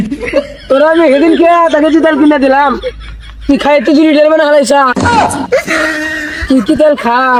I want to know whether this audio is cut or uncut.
uncut